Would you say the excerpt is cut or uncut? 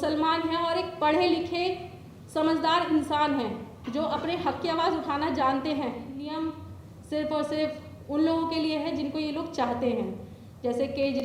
cut